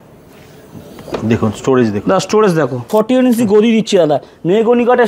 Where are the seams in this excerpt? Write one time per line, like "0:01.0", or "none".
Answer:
0:02.9